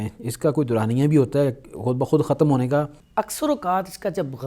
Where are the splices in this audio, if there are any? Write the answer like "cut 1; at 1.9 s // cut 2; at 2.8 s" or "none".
cut 1; at 3.0 s